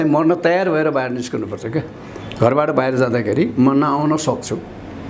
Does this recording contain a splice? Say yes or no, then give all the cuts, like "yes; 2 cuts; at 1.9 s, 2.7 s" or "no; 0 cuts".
no; 0 cuts